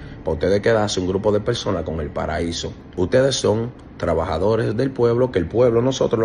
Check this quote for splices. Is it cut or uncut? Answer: cut